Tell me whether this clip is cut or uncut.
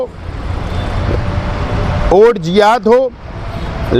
uncut